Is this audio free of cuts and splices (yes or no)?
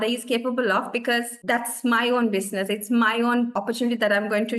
yes